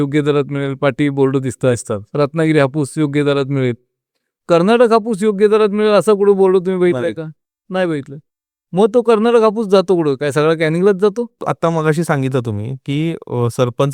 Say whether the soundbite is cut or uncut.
cut